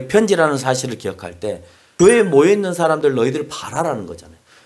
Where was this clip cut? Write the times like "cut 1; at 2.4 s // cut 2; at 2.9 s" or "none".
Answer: cut 1; at 1.8 s